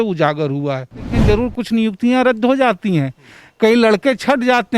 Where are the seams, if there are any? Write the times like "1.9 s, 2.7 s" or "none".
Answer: 1.1 s